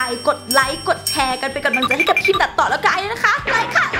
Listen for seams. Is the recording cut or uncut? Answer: uncut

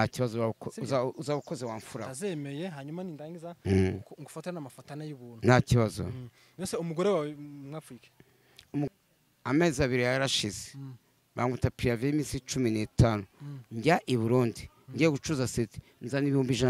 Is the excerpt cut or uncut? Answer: cut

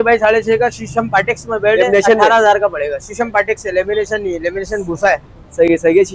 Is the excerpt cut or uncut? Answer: uncut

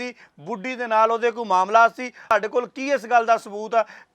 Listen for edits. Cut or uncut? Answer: cut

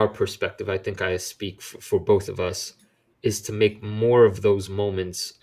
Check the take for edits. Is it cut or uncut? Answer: uncut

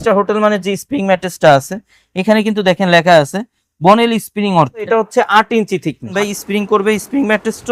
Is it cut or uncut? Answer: cut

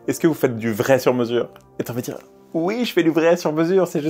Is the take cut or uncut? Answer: uncut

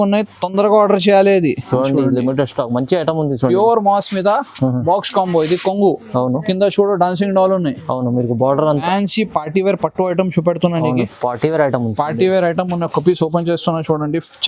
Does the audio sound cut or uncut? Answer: cut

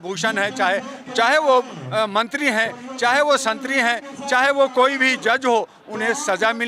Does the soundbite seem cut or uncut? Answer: uncut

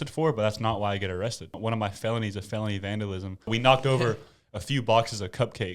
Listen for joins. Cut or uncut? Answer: cut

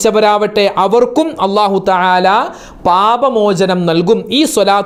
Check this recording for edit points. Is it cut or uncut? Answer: uncut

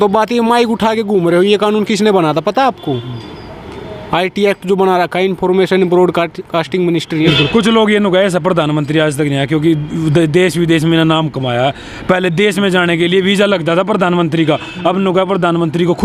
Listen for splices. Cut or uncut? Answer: cut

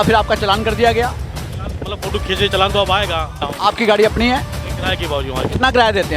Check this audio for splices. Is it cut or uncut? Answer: cut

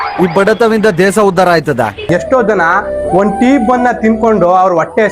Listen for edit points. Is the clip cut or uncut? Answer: cut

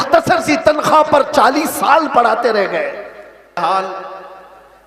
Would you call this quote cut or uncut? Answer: cut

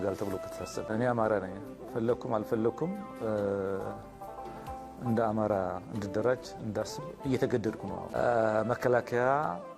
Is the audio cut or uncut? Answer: cut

